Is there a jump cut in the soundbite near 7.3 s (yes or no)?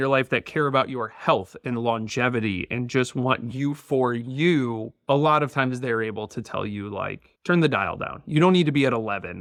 no